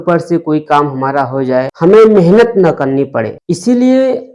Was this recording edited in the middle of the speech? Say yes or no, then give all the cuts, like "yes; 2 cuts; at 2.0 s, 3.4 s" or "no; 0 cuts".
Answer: yes; 2 cuts; at 1.7 s, 3.4 s